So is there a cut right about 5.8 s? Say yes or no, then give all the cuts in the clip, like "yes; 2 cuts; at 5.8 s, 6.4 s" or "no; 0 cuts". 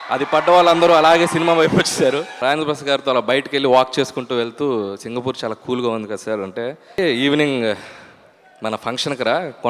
no; 2 cuts; at 2.3 s, 7.0 s